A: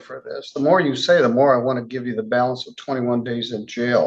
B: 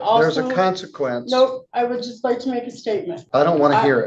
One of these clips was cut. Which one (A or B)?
B